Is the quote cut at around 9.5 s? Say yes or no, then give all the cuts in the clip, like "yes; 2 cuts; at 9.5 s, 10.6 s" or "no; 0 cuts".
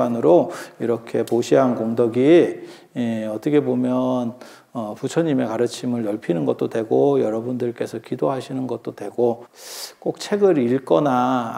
yes; 1 cut; at 9.5 s